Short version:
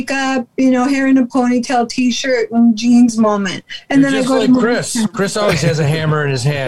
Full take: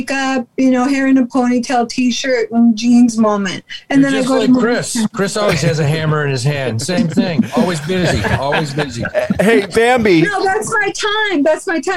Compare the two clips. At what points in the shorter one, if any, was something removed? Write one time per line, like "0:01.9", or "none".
none